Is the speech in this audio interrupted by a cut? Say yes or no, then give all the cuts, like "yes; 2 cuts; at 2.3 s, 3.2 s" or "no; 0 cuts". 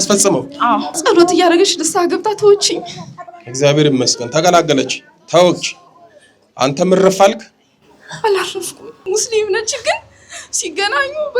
yes; 2 cuts; at 0.9 s, 9.0 s